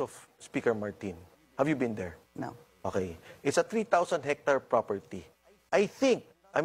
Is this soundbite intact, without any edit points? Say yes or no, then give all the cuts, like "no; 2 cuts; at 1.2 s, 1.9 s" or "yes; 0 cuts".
yes; 0 cuts